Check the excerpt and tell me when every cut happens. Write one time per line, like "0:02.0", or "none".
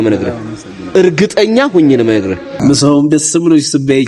0:02.5